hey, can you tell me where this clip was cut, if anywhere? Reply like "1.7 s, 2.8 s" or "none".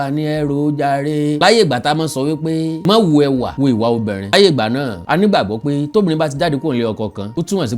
none